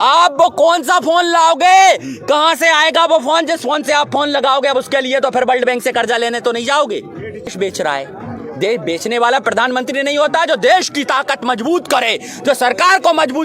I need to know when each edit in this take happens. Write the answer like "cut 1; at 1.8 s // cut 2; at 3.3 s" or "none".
cut 1; at 7.5 s